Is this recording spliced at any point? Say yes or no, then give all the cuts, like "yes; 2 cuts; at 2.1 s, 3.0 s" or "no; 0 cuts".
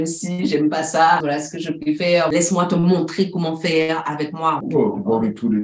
yes; 3 cuts; at 1.2 s, 2.3 s, 4.6 s